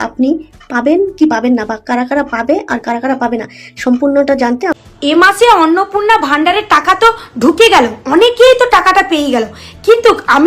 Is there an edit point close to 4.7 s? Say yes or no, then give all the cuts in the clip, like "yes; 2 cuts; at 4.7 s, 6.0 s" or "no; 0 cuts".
yes; 1 cut; at 4.7 s